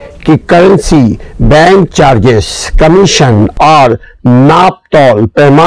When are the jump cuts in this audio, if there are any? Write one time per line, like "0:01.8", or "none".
0:03.5